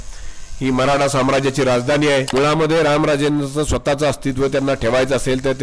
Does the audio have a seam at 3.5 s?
no; 1 cut; at 2.3 s

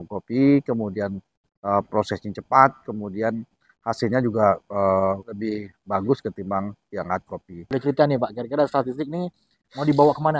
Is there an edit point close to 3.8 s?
no; 2 cuts; at 5.3 s, 7.7 s

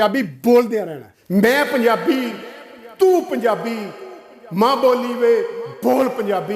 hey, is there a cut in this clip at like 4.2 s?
no; 1 cut; at 1.1 s

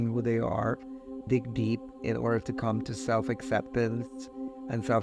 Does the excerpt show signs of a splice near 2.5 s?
no; 1 cut; at 1.2 s

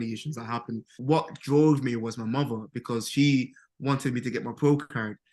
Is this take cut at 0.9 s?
yes; 1 cut; at 0.9 s

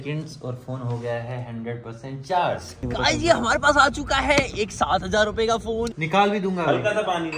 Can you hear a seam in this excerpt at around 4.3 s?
no; 2 cuts; at 2.7 s, 6.0 s

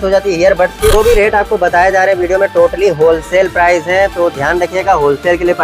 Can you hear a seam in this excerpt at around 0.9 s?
yes; 1 cut; at 0.9 s

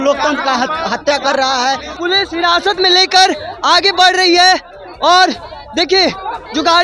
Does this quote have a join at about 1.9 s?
yes; 1 cut; at 1.9 s

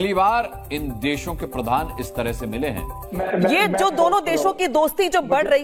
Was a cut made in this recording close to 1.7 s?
no; 1 cut; at 3.2 s

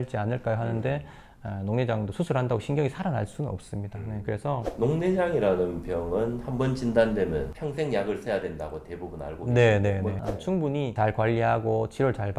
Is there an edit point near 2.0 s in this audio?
no; 2 cuts; at 4.6 s, 10.2 s

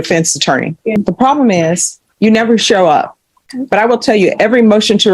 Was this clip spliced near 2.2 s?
no; 2 cuts; at 1.0 s, 3.5 s

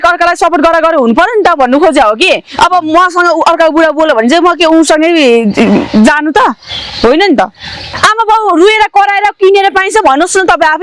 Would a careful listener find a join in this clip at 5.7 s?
no; 1 cut; at 7.8 s

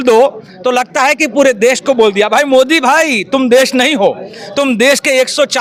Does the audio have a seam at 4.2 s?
no; 0 cuts

